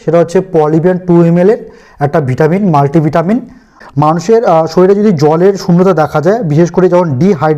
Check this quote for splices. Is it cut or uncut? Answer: cut